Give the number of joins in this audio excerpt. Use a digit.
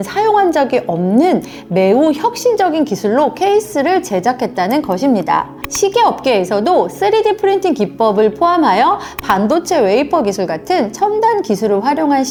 0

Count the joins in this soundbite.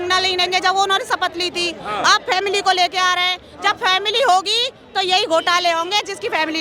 0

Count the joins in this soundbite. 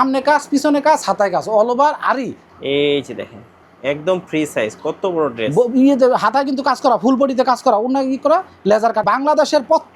2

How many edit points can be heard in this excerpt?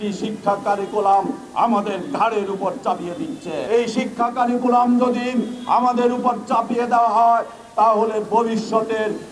1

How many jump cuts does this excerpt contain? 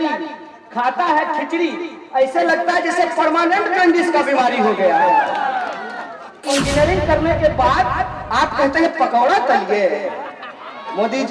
1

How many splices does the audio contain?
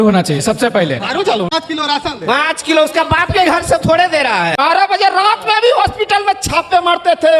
2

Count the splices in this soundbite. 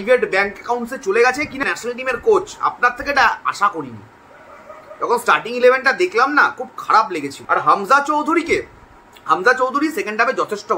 2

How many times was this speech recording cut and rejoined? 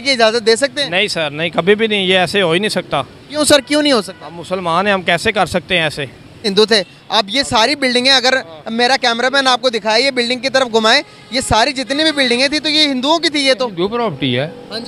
1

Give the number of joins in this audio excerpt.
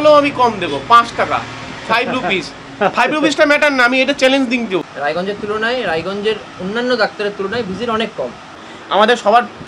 2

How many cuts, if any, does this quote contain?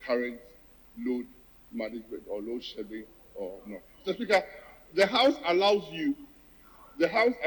0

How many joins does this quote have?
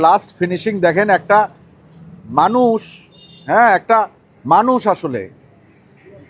0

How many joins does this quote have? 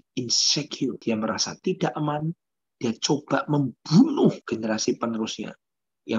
2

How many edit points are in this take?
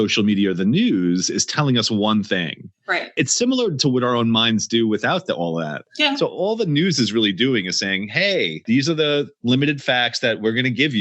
1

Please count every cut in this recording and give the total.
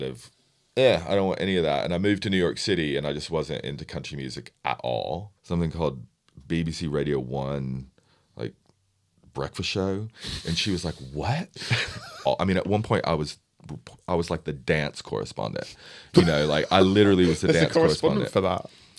2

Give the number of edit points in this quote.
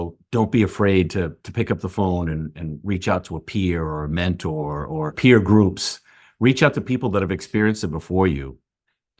1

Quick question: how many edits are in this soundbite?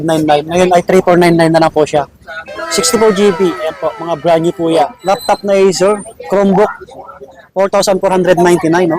1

